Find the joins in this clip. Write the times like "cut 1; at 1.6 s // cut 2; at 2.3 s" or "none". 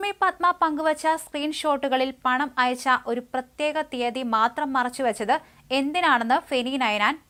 none